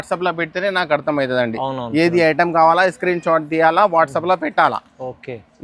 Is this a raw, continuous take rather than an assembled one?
yes; 0 cuts

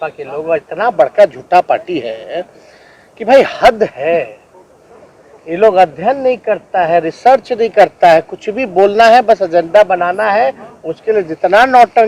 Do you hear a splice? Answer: no; 0 cuts

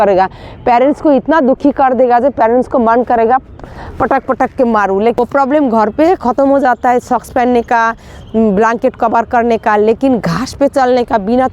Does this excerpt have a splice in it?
yes; 1 cut; at 5.2 s

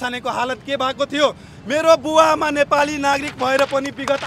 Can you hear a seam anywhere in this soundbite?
no; 0 cuts

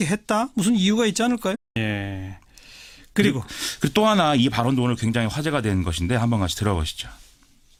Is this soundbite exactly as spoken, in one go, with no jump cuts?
yes; 0 cuts

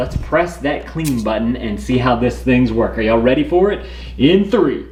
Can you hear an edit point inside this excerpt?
no; 0 cuts

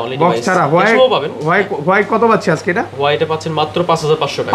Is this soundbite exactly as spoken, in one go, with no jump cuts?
yes; 0 cuts

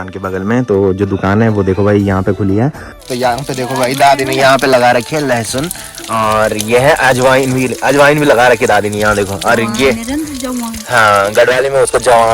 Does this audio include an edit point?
yes; 1 cut; at 2.9 s

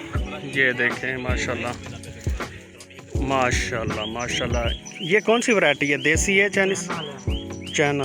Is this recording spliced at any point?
yes; 2 cuts; at 1.7 s, 3.2 s

